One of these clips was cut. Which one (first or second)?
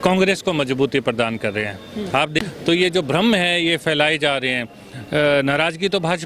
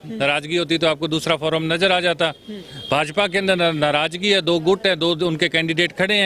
first